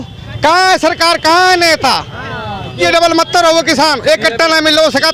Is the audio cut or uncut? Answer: cut